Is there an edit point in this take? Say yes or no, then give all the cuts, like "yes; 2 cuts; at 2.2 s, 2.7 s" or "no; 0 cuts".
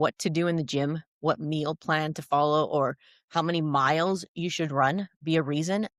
no; 0 cuts